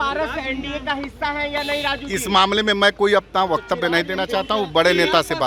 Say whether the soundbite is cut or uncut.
uncut